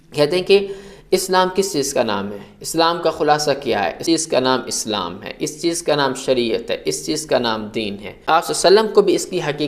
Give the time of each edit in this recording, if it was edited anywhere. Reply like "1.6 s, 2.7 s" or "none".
4.0 s, 8.2 s